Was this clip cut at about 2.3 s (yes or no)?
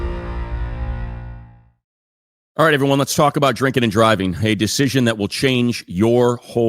yes